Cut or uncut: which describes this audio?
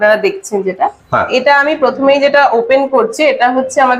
uncut